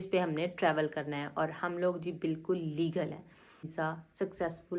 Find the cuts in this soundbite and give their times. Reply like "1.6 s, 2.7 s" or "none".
3.7 s